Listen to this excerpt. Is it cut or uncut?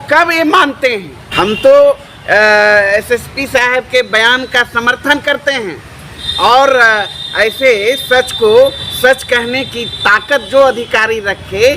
cut